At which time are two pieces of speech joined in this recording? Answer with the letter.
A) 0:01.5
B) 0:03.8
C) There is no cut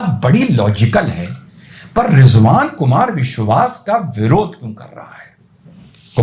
C